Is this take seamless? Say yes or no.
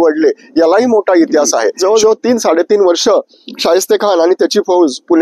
no